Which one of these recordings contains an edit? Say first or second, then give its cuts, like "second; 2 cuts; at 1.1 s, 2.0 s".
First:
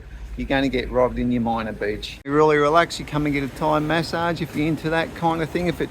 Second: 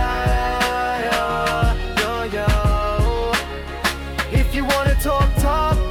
first; 1 cut; at 2.1 s